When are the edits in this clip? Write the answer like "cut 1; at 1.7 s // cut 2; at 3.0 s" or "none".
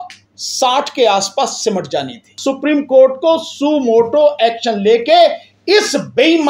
cut 1; at 2.4 s